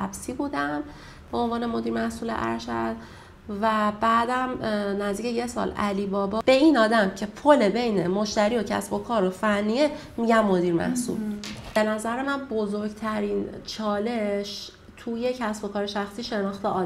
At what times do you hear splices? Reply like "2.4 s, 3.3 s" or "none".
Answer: 6.4 s, 11.8 s

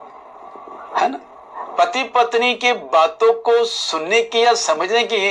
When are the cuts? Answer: 2.0 s

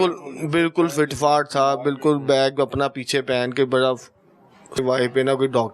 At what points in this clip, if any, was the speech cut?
4.8 s

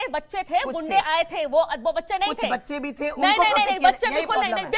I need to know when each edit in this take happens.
none

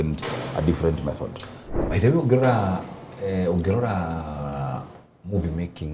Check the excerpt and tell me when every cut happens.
none

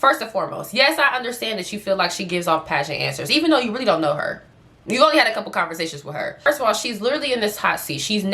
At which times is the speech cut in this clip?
6.4 s

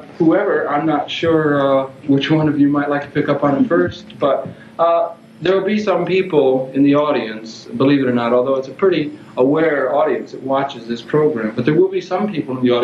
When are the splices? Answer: none

